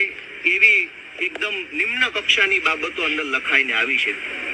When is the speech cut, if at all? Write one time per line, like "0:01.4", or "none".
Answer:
none